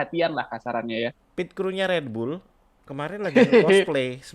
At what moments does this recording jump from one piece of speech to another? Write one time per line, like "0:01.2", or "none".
0:01.2